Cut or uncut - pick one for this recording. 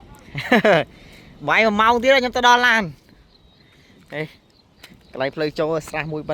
uncut